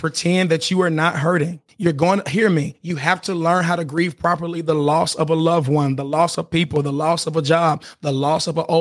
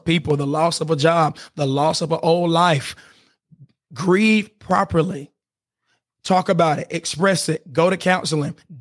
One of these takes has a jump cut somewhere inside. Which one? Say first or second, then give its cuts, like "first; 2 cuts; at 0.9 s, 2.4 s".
first; 1 cut; at 1.6 s